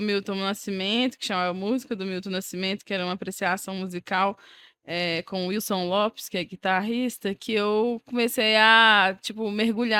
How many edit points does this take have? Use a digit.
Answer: 0